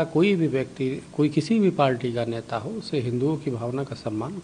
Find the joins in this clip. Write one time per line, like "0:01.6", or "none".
none